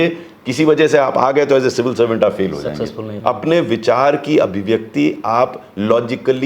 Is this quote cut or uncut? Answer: cut